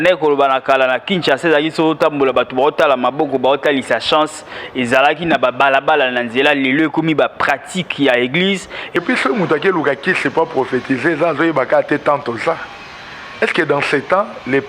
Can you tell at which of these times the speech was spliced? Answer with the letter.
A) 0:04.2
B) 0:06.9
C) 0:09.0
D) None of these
C